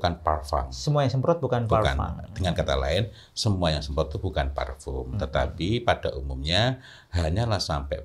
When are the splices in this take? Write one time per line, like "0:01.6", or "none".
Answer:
none